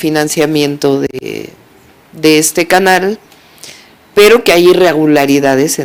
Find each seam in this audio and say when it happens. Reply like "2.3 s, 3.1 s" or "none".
none

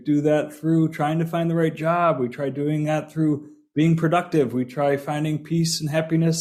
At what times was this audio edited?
none

